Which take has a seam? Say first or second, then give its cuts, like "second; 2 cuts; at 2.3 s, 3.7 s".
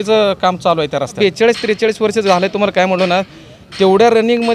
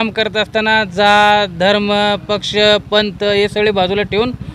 first; 1 cut; at 1.2 s